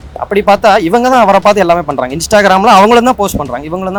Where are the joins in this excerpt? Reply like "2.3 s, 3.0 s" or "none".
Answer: none